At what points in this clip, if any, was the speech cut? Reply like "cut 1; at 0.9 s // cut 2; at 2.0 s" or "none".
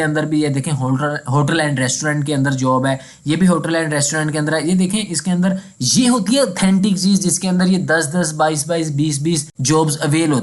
cut 1; at 9.5 s

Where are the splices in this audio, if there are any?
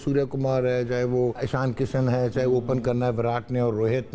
cut 1; at 1.4 s

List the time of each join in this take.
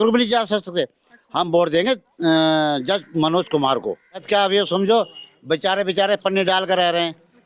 cut 1; at 4.2 s

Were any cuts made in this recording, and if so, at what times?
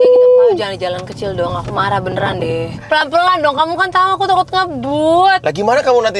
none

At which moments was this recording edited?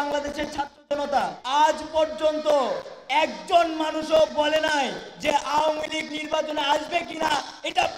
cut 1; at 1.4 s

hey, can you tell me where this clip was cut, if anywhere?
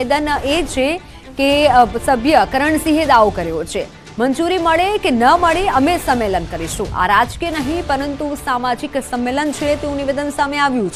none

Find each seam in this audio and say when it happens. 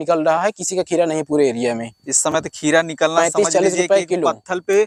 none

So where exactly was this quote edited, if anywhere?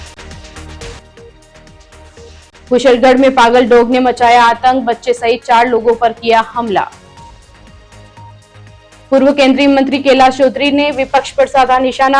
cut 1; at 0.9 s

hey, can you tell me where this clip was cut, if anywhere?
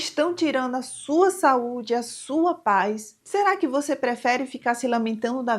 cut 1; at 3.1 s

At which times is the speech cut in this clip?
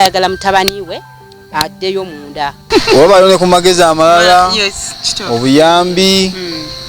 cut 1; at 2.7 s

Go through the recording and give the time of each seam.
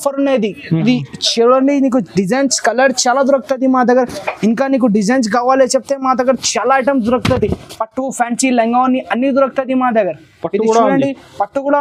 none

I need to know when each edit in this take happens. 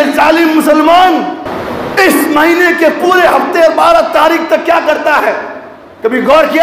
cut 1; at 1.5 s

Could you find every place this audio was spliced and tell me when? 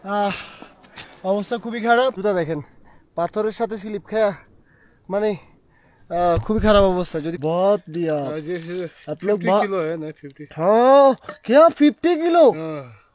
cut 1; at 2.2 s // cut 2; at 7.3 s

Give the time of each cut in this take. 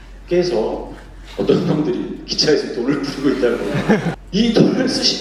cut 1; at 4.2 s

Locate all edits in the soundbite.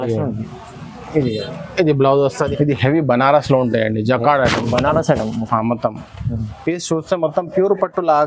cut 1; at 2.5 s

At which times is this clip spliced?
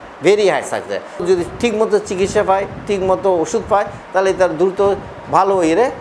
cut 1; at 1.2 s

